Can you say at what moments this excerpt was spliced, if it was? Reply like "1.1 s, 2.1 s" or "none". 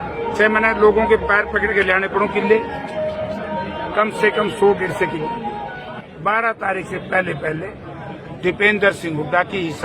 5.8 s